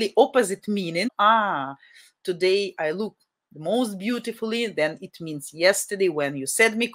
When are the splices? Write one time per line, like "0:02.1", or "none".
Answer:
0:01.1